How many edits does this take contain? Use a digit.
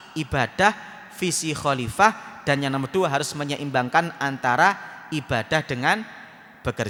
0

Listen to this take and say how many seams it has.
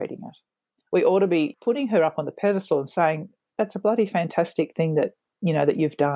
2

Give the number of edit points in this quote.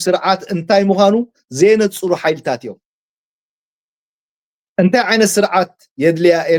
0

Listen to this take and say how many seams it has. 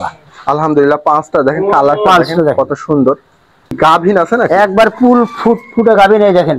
1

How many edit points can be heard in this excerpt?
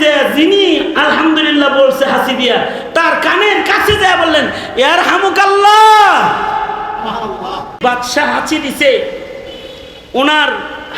1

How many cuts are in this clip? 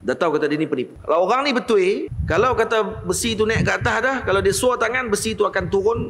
2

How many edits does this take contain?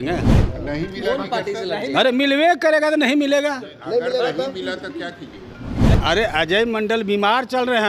1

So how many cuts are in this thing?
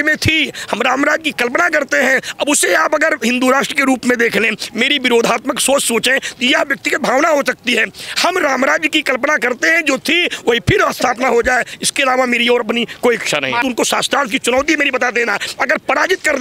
1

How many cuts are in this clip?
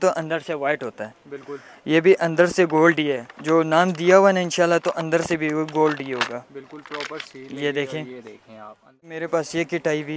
1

